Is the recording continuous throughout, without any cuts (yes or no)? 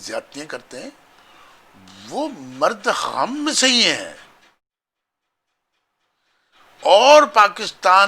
yes